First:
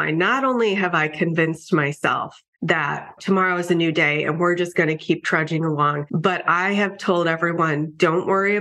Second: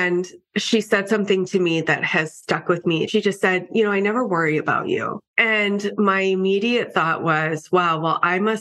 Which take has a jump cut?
second; 1 cut; at 3.1 s

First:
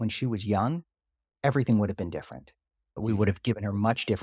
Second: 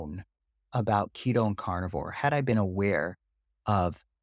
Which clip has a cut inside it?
first; 1 cut; at 3.0 s

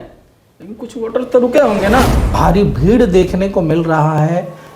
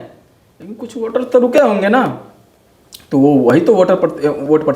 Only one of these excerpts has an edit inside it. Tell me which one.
first; 1 cut; at 2.2 s

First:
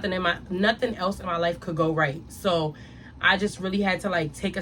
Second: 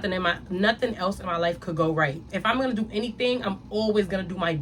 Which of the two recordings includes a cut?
second; 1 cut; at 2.3 s

